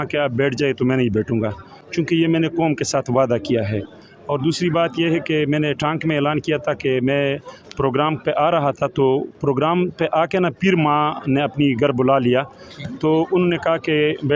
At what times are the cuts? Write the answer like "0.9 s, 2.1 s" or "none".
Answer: none